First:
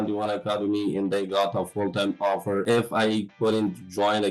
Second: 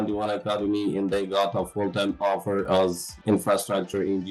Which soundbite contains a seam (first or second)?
first